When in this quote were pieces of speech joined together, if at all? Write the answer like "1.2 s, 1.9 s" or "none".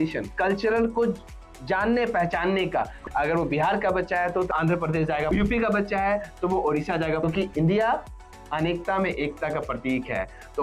3.0 s, 5.3 s, 7.2 s